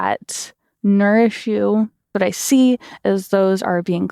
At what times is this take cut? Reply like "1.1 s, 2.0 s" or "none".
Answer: 2.1 s